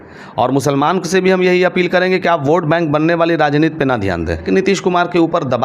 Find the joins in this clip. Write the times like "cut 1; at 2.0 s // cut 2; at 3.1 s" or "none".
cut 1; at 4.5 s